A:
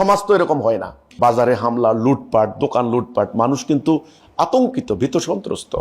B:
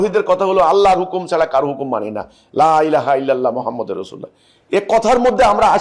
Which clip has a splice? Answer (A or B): A